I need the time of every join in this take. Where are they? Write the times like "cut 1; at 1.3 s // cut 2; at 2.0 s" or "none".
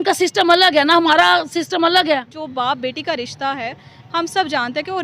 cut 1; at 2.4 s